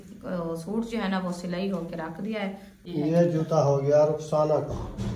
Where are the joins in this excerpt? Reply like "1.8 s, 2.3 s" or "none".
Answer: 2.7 s